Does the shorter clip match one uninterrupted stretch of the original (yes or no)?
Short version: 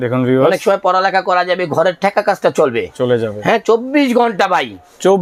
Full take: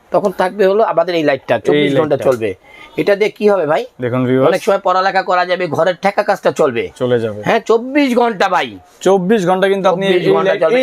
yes